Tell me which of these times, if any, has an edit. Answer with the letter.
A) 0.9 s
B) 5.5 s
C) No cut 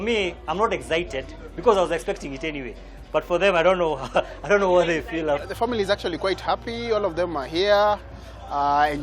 B